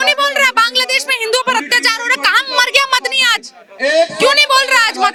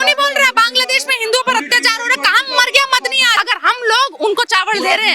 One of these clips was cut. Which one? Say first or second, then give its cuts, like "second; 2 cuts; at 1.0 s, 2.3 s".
second; 1 cut; at 3.4 s